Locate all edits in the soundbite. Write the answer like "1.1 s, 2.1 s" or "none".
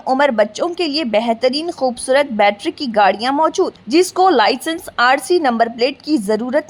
none

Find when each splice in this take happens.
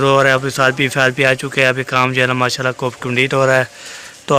none

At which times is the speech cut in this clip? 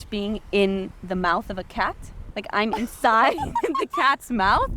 2.2 s

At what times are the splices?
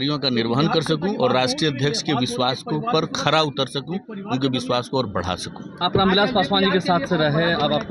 none

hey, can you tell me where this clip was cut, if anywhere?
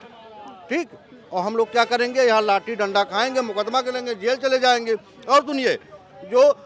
none

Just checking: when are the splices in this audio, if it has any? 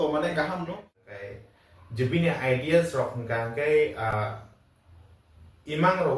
1.0 s

